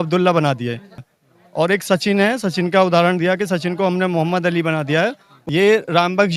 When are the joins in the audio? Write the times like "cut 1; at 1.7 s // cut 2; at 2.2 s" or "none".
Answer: cut 1; at 1.0 s // cut 2; at 5.3 s